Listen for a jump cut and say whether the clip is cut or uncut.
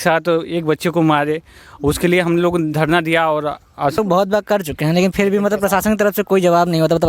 cut